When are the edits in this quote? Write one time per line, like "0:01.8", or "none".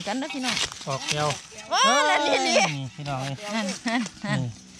none

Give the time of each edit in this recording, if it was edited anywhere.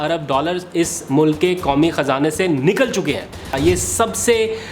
0:03.5

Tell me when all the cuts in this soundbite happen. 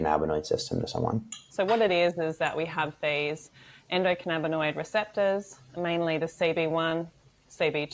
0:01.4

